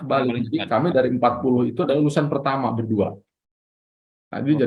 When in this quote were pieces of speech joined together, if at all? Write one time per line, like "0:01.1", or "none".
none